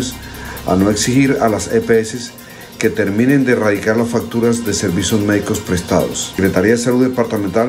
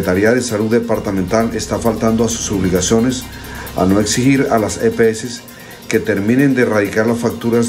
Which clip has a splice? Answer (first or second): first